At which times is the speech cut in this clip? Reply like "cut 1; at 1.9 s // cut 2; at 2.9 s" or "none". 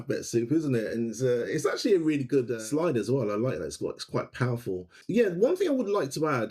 cut 1; at 2.6 s // cut 2; at 5.0 s